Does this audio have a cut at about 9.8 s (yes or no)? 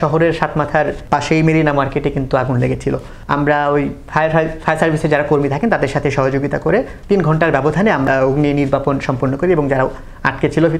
no